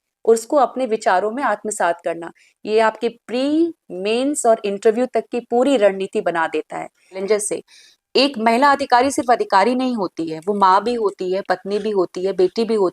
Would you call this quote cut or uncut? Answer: cut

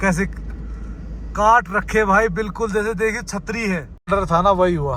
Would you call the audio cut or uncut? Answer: cut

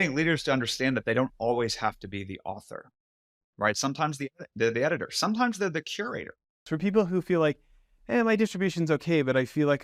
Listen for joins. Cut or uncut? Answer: cut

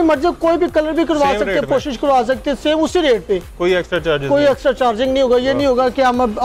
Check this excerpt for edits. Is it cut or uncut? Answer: uncut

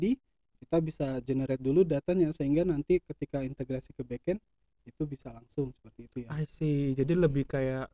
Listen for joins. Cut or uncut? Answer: uncut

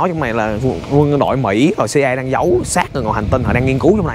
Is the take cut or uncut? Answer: uncut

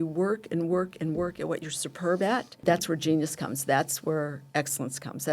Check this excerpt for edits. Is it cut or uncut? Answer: cut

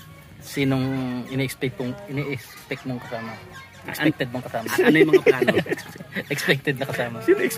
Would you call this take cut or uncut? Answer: uncut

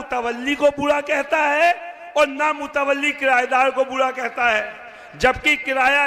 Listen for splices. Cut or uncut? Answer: uncut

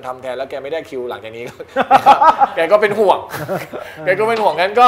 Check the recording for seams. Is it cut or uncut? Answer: uncut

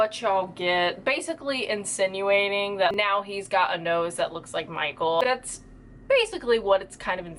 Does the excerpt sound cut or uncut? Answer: cut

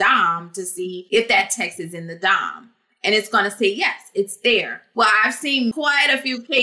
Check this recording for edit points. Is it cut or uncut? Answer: cut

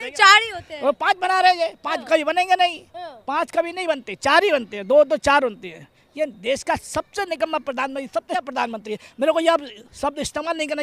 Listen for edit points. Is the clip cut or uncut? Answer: cut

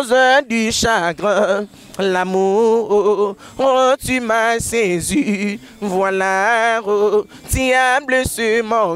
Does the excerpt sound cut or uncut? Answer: uncut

